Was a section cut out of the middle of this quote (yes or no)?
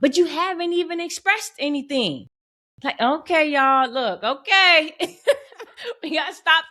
no